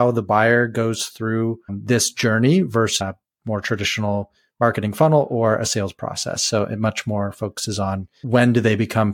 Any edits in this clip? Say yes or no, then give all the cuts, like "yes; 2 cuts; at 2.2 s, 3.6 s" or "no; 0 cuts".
yes; 3 cuts; at 1.8 s, 3.0 s, 8.2 s